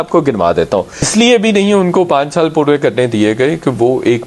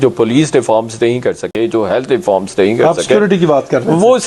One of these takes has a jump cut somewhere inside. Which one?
first; 1 cut; at 1.1 s

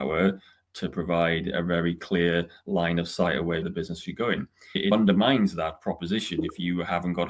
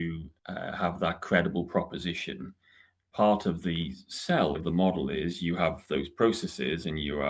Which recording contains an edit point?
second; 1 cut; at 4.6 s

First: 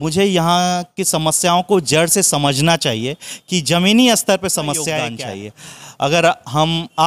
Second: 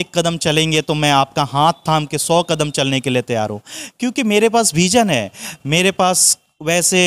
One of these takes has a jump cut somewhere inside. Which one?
first; 1 cut; at 5.2 s

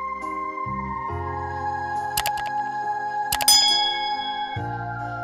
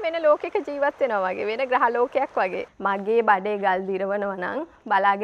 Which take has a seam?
second; 1 cut; at 2.7 s

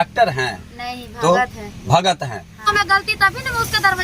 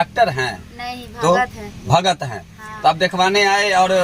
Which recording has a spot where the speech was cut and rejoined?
first; 1 cut; at 2.6 s

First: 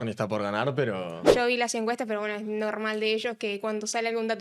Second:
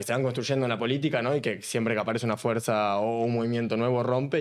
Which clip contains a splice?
first; 1 cut; at 1.3 s

